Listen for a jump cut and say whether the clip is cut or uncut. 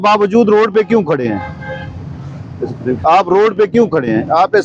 uncut